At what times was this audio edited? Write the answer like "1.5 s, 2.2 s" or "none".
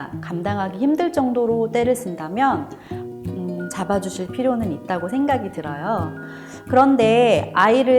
none